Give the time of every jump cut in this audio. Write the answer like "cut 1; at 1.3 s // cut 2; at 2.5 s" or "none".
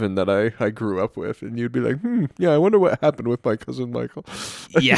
none